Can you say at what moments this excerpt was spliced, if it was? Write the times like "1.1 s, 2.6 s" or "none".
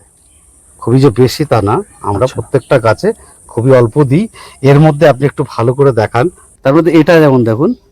6.5 s

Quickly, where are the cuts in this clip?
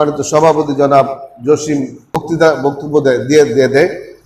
2.2 s

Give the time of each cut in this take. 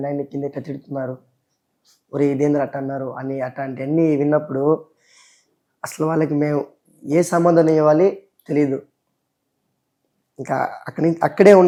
none

